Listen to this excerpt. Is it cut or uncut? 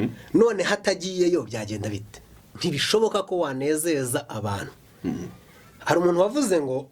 cut